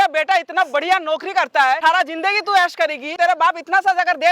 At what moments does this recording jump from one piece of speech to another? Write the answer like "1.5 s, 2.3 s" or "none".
1.8 s, 3.1 s